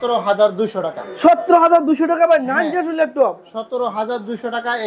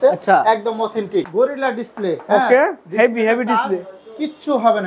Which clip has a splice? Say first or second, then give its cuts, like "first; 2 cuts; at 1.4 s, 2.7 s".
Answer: second; 1 cut; at 1.3 s